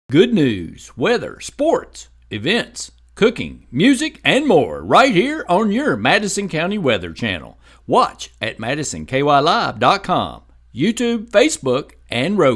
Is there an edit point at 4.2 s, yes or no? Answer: no